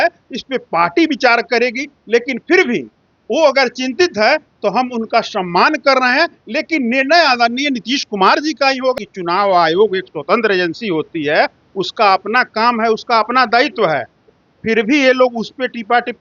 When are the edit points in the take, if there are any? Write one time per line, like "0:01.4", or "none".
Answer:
0:08.9